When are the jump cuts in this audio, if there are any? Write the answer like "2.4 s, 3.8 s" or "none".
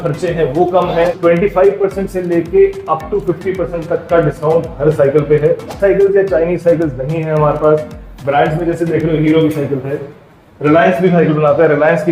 1.2 s, 5.8 s